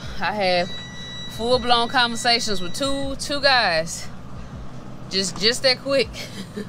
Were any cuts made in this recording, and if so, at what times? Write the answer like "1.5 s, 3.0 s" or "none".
none